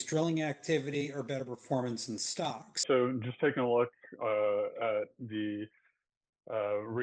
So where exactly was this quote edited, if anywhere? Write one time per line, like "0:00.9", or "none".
0:02.8

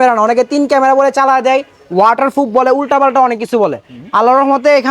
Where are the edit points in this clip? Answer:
none

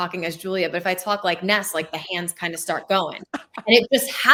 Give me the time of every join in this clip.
none

